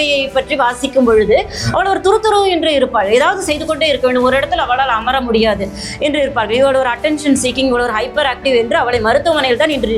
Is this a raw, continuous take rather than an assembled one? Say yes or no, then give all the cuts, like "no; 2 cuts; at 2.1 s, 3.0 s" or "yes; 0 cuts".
yes; 0 cuts